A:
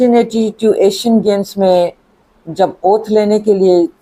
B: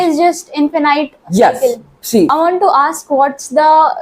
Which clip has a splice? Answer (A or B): B